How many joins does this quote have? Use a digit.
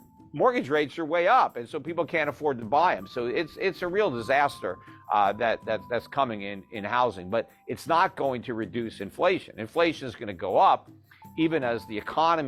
0